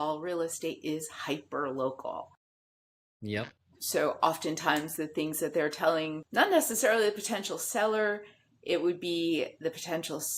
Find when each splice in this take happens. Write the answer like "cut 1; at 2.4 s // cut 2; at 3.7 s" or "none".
none